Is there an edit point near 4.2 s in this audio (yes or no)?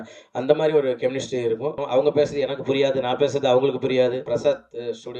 yes